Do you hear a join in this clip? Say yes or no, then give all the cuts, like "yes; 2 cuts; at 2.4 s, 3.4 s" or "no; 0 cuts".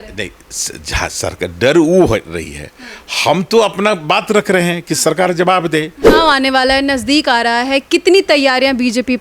yes; 1 cut; at 6.0 s